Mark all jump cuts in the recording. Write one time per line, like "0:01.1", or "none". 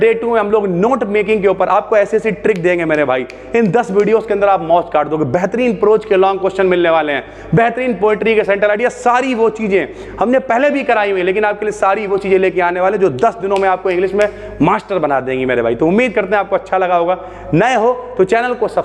none